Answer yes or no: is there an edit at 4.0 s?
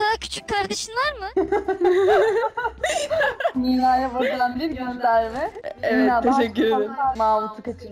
no